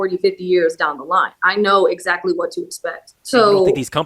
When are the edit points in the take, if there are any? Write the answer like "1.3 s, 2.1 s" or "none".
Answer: 3.1 s

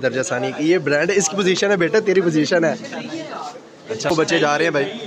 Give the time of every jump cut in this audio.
4.1 s

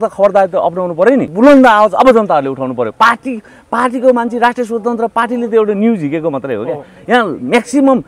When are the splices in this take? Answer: 1.3 s

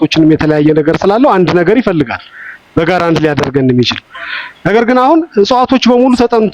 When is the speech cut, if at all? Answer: none

